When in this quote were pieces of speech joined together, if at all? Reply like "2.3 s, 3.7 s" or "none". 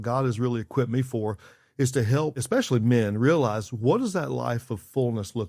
2.4 s